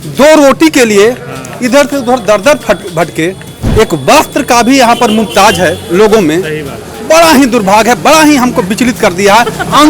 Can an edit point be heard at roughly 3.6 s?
yes; 1 cut; at 3.6 s

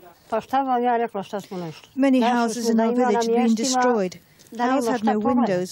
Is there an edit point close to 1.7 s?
no; 0 cuts

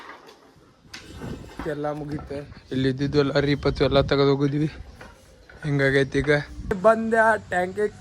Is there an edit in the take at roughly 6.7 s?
yes; 2 cuts; at 1.6 s, 6.7 s

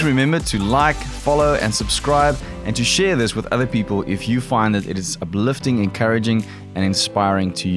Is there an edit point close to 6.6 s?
no; 0 cuts

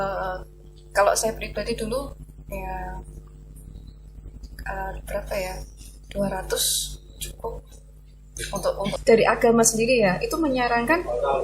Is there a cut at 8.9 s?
yes; 1 cut; at 8.9 s

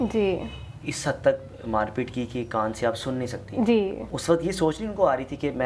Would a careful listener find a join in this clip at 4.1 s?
yes; 1 cut; at 4.1 s

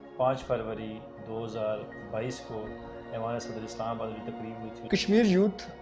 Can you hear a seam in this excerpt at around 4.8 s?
yes; 1 cut; at 4.8 s

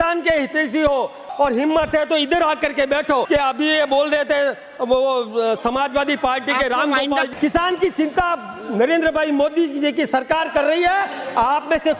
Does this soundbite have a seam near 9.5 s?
no; 3 cuts; at 1.3 s, 3.3 s, 7.3 s

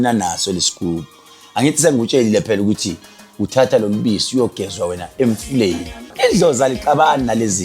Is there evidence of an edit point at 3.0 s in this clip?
no; 1 cut; at 6.1 s

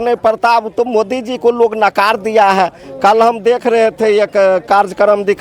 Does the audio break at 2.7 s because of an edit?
no; 0 cuts

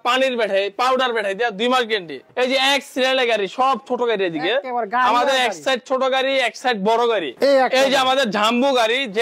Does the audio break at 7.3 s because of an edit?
yes; 2 cuts; at 2.2 s, 7.3 s

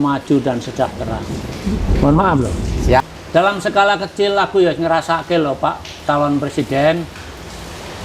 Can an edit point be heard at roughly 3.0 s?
yes; 1 cut; at 3.0 s

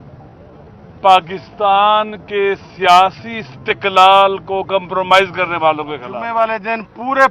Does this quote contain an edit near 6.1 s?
yes; 1 cut; at 6.1 s

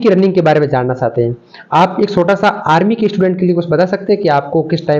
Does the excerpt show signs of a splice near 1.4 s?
no; 0 cuts

